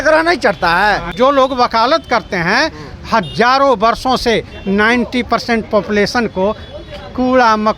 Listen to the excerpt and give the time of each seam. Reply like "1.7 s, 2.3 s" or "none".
1.1 s

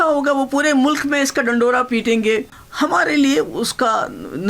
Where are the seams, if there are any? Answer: 2.6 s

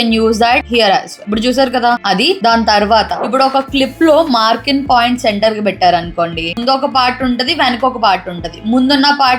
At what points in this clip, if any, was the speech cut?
none

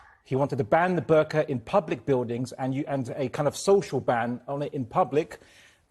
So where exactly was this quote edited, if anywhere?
none

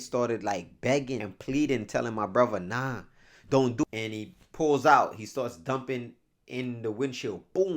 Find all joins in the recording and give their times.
1.3 s, 3.8 s

